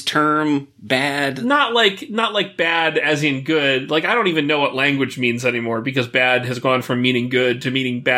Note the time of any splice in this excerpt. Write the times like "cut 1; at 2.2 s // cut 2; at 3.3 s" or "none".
cut 1; at 1.3 s